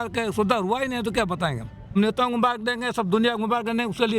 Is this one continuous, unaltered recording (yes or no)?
no